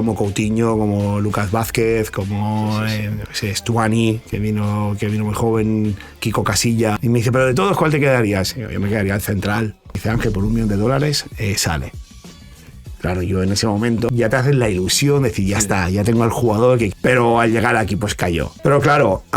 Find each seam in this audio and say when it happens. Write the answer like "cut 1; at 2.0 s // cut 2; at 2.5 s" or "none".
cut 1; at 7.0 s // cut 2; at 10.0 s // cut 3; at 14.1 s // cut 4; at 16.9 s // cut 5; at 18.5 s